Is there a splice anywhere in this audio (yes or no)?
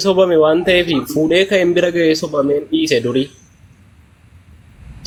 no